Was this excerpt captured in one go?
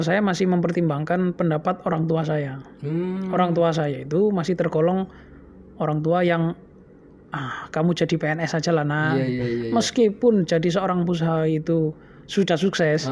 yes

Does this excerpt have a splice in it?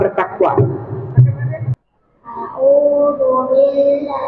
yes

